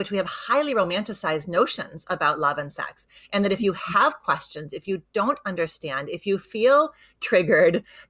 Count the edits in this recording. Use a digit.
0